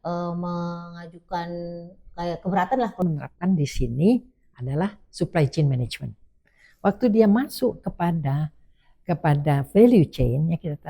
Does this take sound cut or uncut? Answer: cut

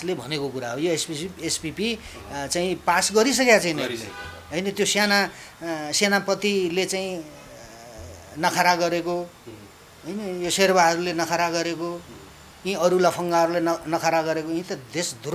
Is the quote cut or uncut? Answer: uncut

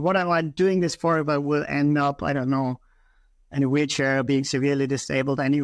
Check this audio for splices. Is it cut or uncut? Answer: uncut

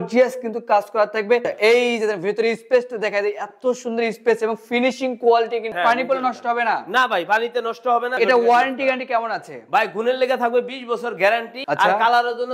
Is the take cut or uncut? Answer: cut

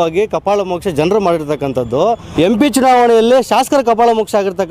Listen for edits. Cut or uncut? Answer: cut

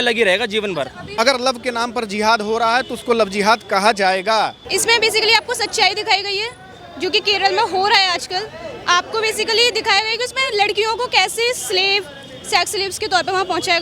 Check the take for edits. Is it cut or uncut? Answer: cut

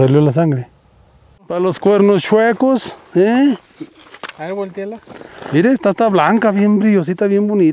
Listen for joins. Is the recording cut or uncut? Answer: cut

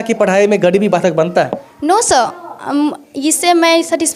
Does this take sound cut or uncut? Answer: uncut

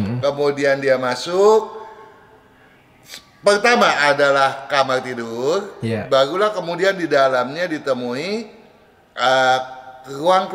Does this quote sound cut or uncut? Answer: uncut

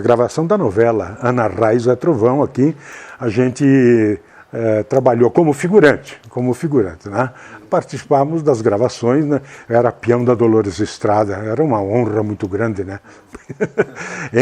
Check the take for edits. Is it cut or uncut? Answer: uncut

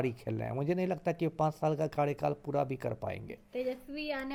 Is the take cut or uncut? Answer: uncut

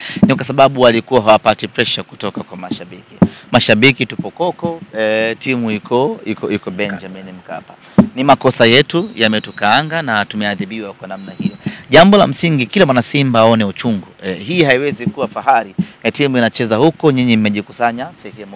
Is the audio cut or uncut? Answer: uncut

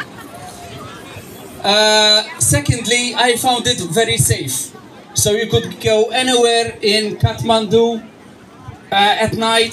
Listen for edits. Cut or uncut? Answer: uncut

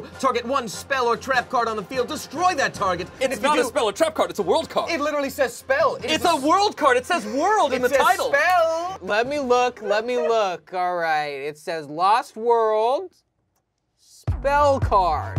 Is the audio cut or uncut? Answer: cut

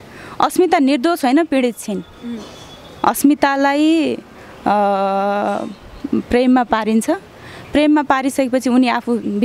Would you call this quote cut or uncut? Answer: uncut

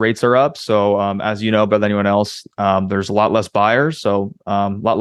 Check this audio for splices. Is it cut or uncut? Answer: uncut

